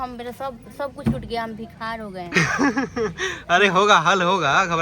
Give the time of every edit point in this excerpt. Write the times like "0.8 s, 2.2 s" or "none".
none